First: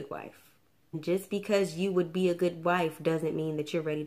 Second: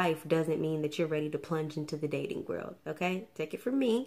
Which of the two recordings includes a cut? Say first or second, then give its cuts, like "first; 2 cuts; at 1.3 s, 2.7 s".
first; 1 cut; at 1.0 s